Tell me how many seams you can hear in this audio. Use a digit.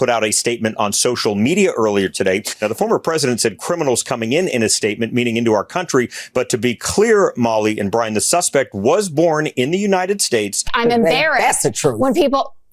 2